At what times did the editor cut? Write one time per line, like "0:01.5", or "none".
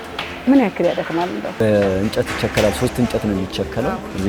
0:01.6